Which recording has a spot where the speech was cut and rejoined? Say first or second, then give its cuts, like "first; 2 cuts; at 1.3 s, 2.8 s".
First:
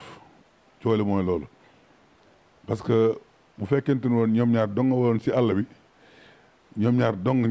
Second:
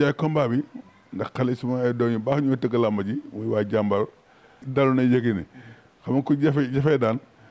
second; 1 cut; at 4.7 s